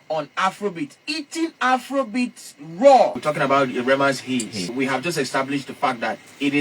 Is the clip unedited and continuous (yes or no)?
no